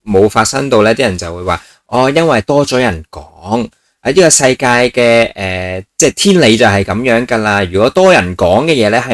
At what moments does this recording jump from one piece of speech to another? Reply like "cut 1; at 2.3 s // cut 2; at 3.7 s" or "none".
none